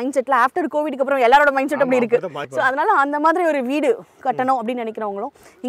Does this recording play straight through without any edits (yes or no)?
no